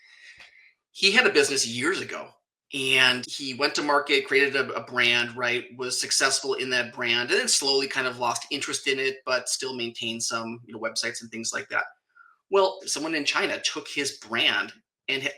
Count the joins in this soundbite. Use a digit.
2